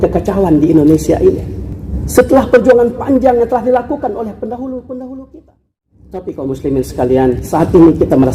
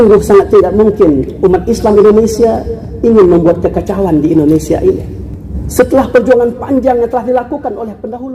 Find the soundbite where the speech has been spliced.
first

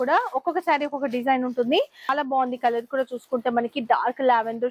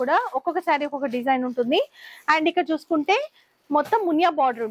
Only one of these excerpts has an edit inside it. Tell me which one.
first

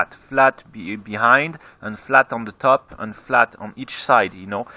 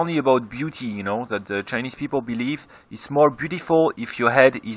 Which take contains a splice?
second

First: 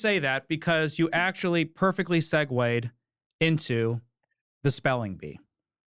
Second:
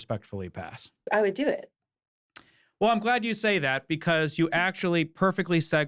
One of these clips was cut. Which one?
second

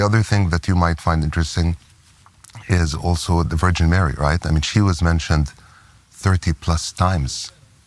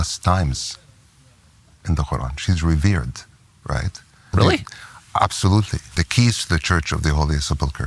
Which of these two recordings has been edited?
second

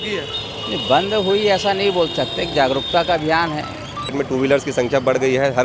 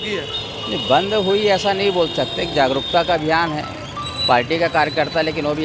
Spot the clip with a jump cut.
first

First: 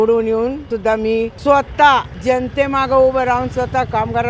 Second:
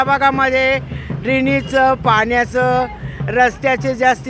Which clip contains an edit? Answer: first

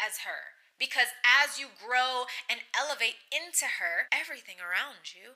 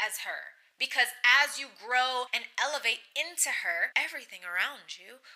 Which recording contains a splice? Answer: second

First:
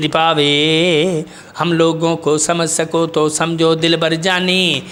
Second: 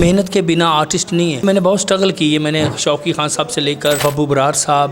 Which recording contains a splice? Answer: second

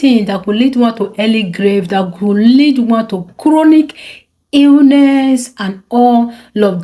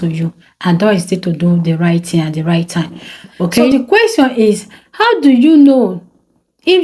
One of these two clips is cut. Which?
second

